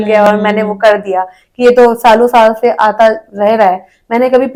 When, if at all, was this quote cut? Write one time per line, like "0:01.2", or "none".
none